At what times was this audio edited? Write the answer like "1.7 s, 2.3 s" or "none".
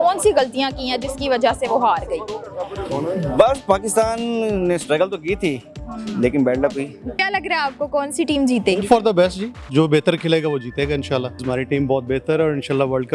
7.1 s, 11.4 s